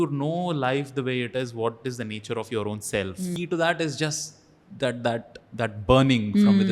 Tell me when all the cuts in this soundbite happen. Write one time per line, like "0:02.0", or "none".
0:03.3